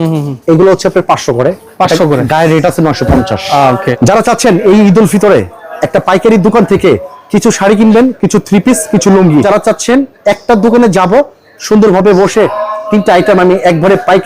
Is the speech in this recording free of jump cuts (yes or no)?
no